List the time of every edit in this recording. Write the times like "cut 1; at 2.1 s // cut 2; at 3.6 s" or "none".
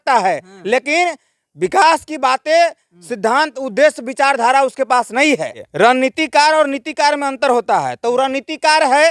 cut 1; at 5.6 s